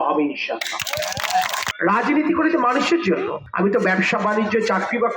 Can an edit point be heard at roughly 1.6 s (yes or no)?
yes